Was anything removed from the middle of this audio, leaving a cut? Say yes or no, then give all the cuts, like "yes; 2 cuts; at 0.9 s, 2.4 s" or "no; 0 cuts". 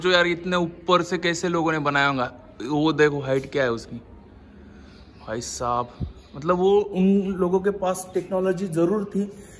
no; 0 cuts